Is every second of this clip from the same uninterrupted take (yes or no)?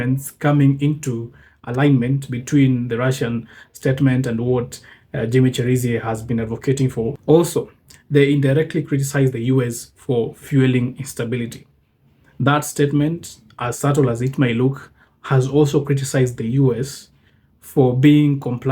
no